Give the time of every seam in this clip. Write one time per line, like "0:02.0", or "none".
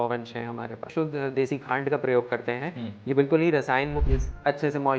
0:00.9
0:04.0